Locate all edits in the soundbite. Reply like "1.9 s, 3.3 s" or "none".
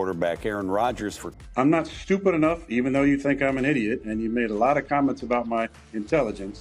1.4 s